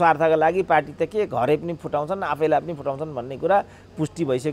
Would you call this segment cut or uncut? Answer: uncut